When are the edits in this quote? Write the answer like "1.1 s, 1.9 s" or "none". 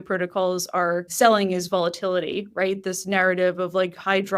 1.1 s